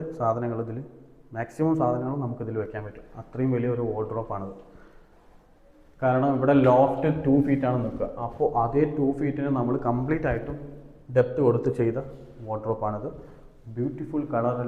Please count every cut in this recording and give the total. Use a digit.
0